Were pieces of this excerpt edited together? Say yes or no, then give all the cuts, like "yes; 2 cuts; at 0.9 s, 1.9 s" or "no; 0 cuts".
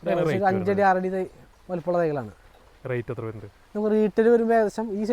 no; 0 cuts